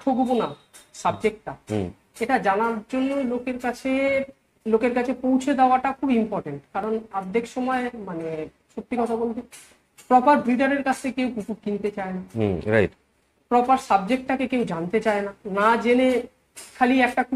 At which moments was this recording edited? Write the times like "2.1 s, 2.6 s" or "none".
none